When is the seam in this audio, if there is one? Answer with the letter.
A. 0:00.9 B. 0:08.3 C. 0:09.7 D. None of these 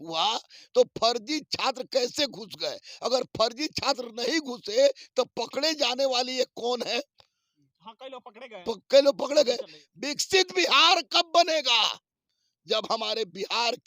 C